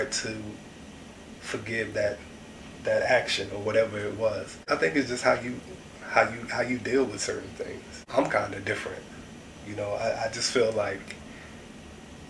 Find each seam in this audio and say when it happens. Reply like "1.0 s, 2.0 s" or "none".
4.7 s, 8.1 s